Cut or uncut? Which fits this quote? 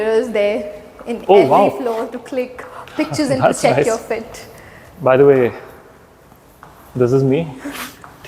uncut